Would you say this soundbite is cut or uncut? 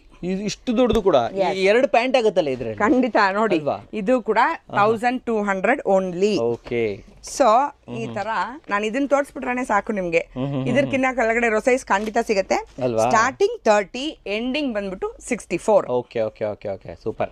uncut